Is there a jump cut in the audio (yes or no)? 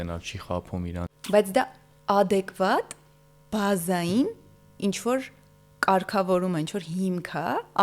yes